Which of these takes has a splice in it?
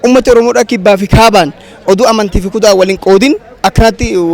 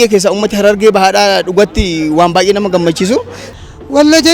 second; 1 cut; at 3.4 s

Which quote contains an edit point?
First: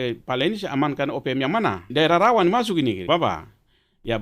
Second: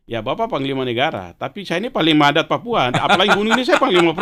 first; 2 cuts; at 1.9 s, 3.0 s

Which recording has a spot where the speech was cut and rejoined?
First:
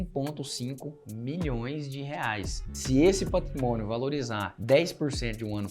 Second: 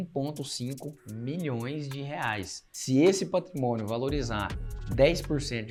first; 1 cut; at 4.5 s

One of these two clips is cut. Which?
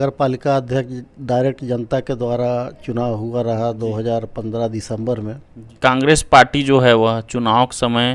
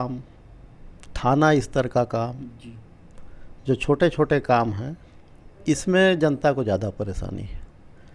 first; 1 cut; at 5.6 s

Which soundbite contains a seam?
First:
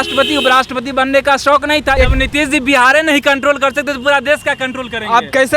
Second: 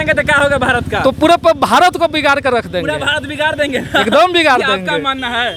first; 1 cut; at 2.0 s

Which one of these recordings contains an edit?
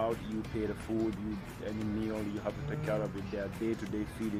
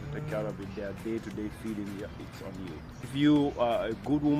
second; 1 cut; at 3.0 s

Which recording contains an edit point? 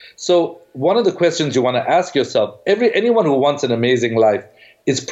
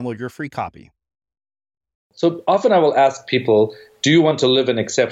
second; 1 cut; at 2.1 s

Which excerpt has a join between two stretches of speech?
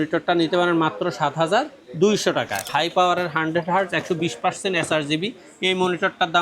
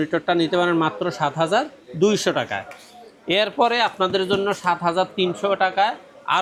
first; 1 cut; at 2.7 s

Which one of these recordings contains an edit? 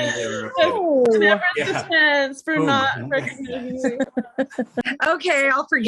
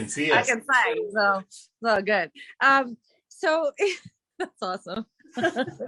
first; 1 cut; at 4.9 s

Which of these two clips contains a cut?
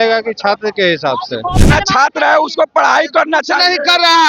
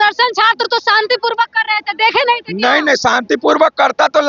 first; 1 cut; at 1.6 s

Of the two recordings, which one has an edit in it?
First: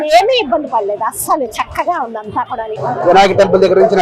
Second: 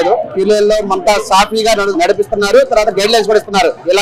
first; 1 cut; at 2.8 s

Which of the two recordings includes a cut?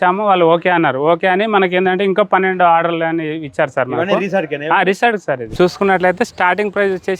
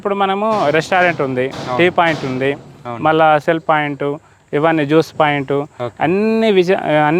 first; 1 cut; at 5.6 s

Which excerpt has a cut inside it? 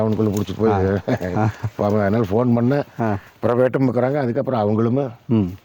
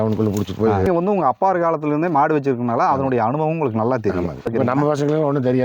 second; 2 cuts; at 0.9 s, 4.5 s

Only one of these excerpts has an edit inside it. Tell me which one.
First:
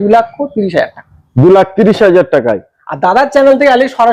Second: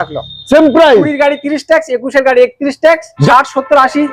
second; 1 cut; at 3.1 s

